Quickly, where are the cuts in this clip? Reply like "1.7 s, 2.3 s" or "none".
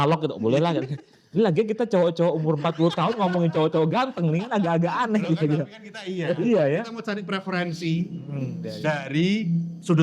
none

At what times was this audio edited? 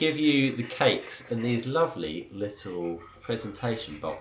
none

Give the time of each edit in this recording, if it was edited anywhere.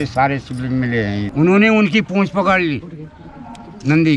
1.3 s

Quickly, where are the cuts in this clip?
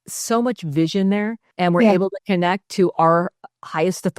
1.4 s

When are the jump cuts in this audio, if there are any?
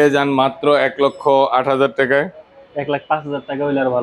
none

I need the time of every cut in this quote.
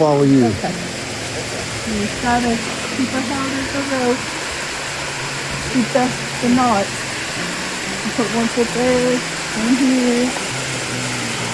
none

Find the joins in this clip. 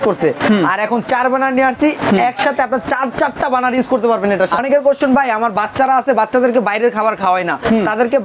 4.6 s

